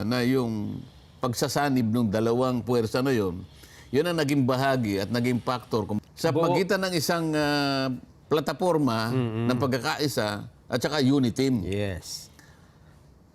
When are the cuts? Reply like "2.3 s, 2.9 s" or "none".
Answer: 5.9 s